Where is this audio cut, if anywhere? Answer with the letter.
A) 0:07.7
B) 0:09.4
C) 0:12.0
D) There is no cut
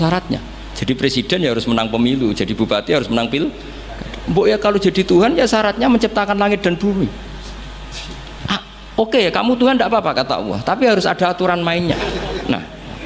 C